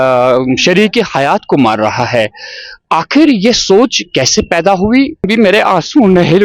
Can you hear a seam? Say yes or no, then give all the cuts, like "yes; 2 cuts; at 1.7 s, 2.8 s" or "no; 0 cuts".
yes; 1 cut; at 5.3 s